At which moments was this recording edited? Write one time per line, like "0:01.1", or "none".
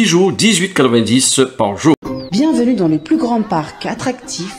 0:02.1